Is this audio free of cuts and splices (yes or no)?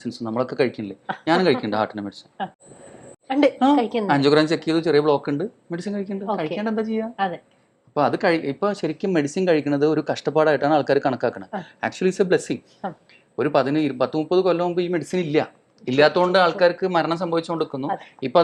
yes